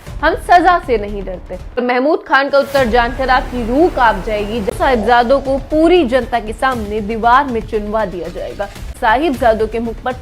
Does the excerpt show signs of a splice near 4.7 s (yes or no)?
yes